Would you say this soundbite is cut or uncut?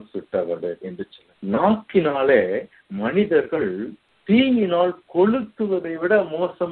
cut